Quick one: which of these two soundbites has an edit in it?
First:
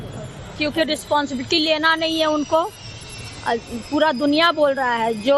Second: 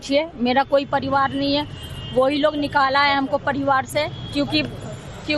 first; 1 cut; at 2.0 s

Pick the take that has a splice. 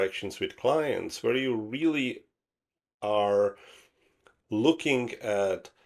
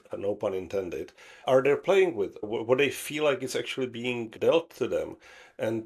second; 3 cuts; at 1.4 s, 2.5 s, 4.3 s

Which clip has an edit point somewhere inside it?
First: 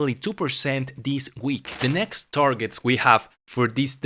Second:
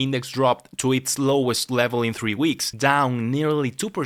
first; 1 cut; at 1.7 s

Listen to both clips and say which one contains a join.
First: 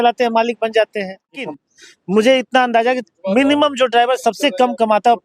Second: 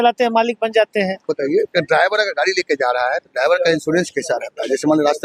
first; 1 cut; at 1.4 s

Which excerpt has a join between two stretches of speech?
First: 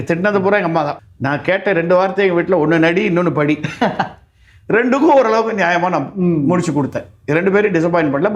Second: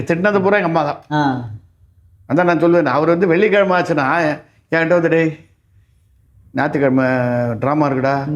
first; 1 cut; at 1.0 s

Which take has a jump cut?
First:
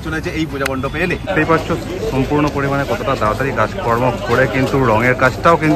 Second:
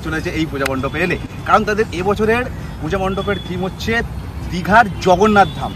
first; 1 cut; at 1.3 s

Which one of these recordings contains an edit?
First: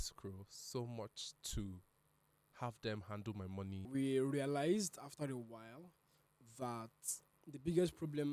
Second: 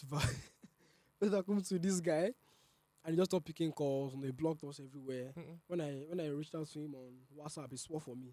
first; 2 cuts; at 3.9 s, 7.3 s

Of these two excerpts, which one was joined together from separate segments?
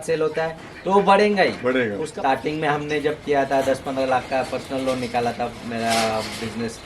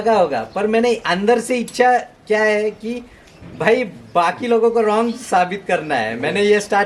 first; 1 cut; at 2.0 s

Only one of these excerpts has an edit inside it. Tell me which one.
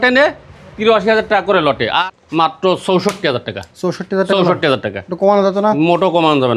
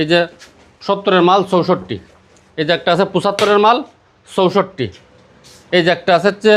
first; 1 cut; at 2.0 s

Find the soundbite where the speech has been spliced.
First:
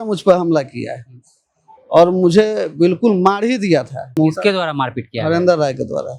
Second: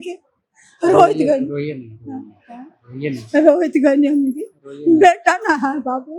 first; 1 cut; at 4.2 s

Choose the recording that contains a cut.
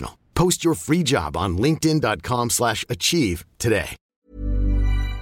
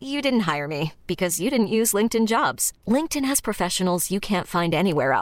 first; 1 cut; at 4.0 s

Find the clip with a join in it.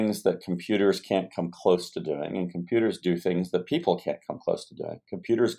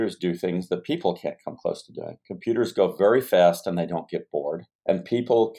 second; 1 cut; at 4.7 s

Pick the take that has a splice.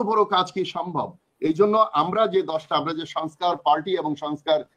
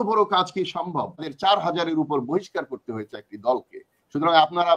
second; 1 cut; at 1.3 s

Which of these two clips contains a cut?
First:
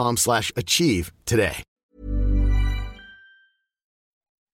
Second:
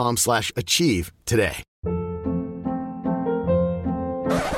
second; 1 cut; at 1.7 s

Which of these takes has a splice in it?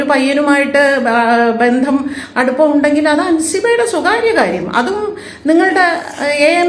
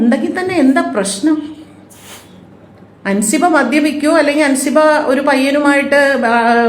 first; 1 cut; at 5.3 s

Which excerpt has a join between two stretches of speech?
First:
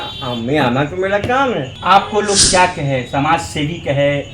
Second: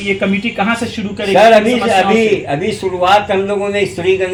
first; 1 cut; at 1.7 s

